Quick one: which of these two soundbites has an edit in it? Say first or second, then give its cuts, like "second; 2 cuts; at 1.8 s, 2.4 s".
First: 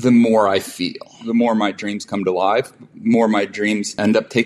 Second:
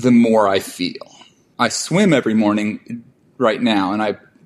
first; 1 cut; at 1.2 s